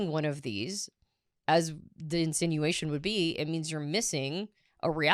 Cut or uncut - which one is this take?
uncut